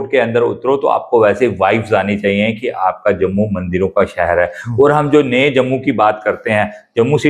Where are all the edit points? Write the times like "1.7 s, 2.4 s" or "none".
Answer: none